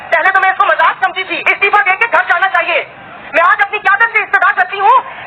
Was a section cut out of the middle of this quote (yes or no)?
yes